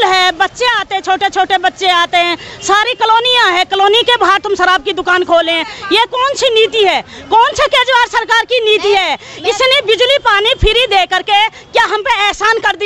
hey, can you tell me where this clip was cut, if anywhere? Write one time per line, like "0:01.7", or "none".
none